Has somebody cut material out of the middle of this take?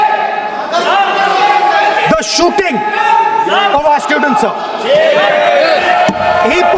no; 0 cuts

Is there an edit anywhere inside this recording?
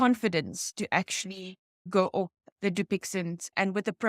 yes; 1 cut; at 1.7 s

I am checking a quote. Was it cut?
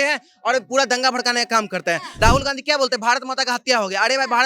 yes; 1 cut; at 2.1 s

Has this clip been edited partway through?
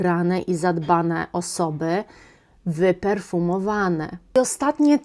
yes; 1 cut; at 4.2 s

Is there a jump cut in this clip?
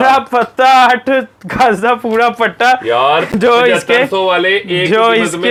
no; 0 cuts

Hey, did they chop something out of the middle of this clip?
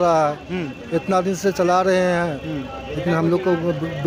no; 0 cuts

